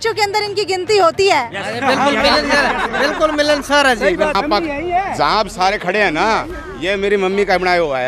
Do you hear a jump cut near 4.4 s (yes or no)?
yes